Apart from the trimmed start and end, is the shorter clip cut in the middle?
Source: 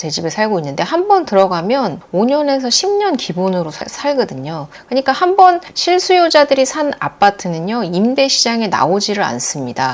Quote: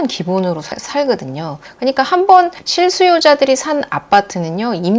no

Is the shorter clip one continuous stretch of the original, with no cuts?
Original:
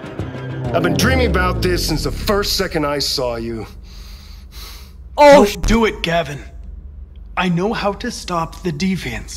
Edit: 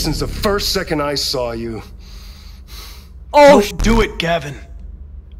yes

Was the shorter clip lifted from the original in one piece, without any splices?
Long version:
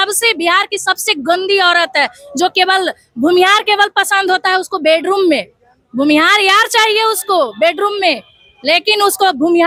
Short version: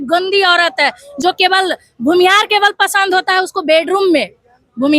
yes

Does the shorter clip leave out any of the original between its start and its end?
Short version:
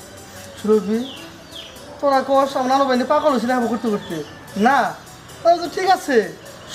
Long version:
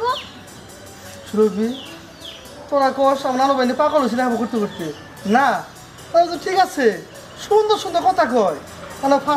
no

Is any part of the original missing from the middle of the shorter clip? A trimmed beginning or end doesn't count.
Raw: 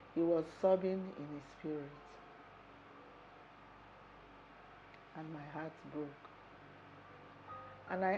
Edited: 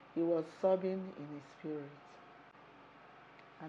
yes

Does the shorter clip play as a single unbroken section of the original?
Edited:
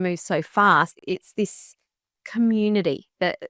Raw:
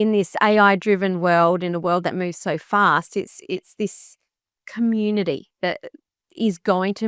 no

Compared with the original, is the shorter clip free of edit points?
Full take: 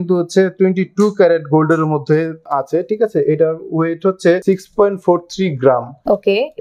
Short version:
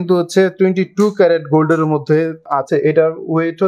no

